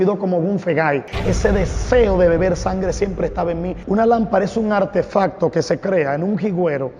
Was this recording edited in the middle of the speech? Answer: yes; 2 cuts; at 1.1 s, 3.7 s

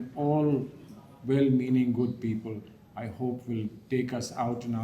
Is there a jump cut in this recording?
no; 0 cuts

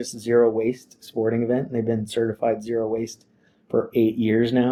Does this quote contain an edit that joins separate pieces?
no; 0 cuts

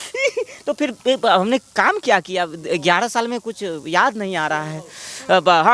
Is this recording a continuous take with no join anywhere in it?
yes; 0 cuts

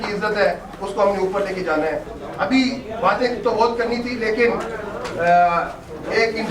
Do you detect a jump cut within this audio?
yes; 1 cut; at 2.2 s

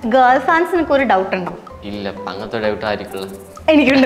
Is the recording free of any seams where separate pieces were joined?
yes; 0 cuts

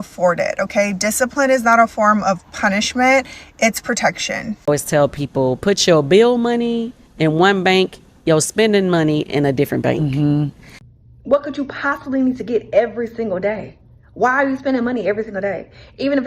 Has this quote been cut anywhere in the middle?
yes; 2 cuts; at 4.5 s, 10.6 s

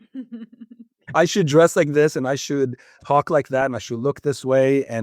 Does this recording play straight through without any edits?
no; 2 cuts; at 1.1 s, 3.0 s

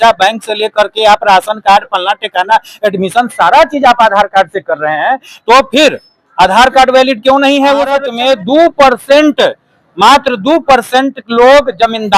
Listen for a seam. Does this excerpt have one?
yes; 1 cut; at 8.1 s

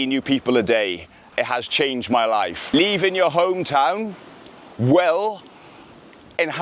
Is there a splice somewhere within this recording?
yes; 2 cuts; at 1.3 s, 2.6 s

